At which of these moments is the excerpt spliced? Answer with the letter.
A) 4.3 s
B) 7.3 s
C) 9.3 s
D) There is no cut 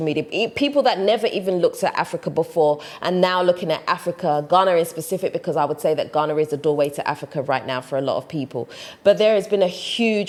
D